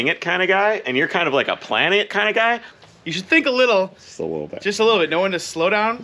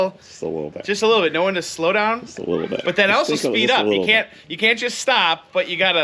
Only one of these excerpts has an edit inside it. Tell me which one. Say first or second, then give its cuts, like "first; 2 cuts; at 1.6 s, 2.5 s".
first; 1 cut; at 2.7 s